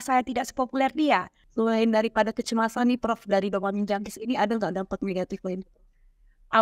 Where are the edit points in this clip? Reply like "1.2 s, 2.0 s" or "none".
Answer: 1.4 s

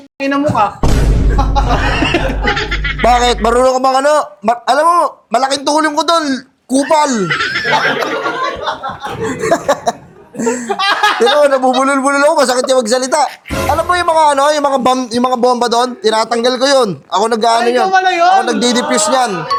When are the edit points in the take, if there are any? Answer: none

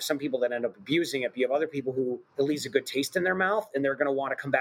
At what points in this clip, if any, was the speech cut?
2.2 s

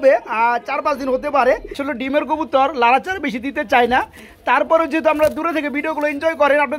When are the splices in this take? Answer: 1.9 s

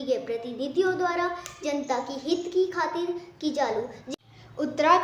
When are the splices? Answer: 4.0 s

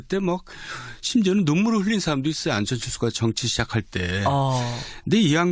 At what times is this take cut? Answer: none

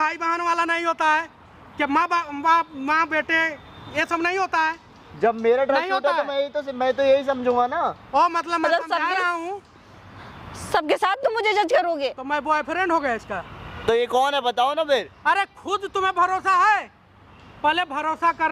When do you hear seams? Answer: none

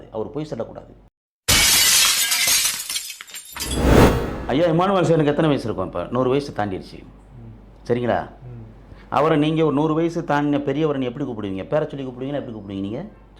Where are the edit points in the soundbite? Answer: 3.7 s, 4.3 s

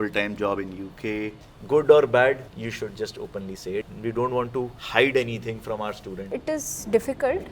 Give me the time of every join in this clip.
1.5 s, 2.5 s, 3.9 s, 4.8 s, 6.3 s

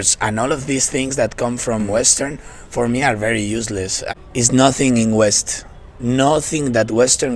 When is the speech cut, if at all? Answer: 1.9 s, 3.8 s

